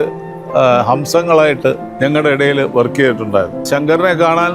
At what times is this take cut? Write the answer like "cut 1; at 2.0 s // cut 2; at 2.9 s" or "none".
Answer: cut 1; at 1.9 s // cut 2; at 3.6 s